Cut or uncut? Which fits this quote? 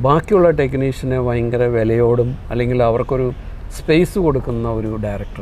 uncut